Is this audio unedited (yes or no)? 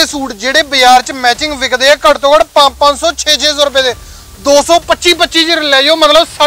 yes